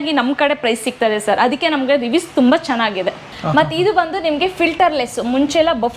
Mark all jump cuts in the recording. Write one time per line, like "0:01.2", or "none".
0:03.2